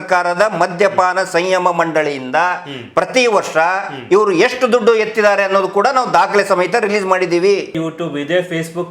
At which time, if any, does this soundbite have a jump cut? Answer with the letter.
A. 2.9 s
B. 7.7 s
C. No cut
B